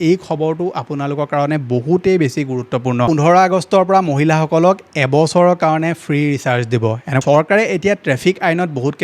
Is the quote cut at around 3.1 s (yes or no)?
yes